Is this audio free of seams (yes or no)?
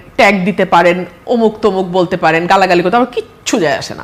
yes